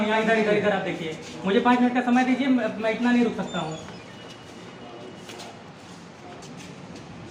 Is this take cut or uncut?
uncut